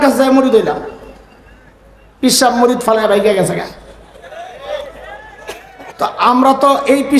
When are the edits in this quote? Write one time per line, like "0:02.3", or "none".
none